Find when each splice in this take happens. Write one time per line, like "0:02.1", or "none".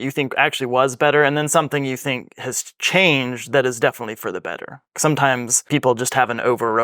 0:05.5